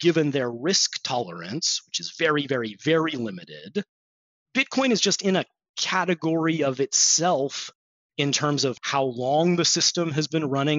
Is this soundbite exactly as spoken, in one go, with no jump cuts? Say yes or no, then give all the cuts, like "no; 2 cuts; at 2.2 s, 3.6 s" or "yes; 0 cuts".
no; 2 cuts; at 8.0 s, 8.8 s